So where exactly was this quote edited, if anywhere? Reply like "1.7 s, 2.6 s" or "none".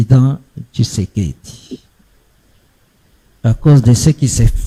none